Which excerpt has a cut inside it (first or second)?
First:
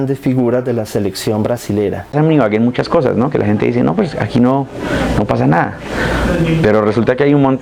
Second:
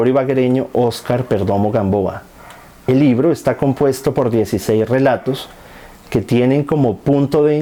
first